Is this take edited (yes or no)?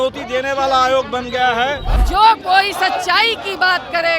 yes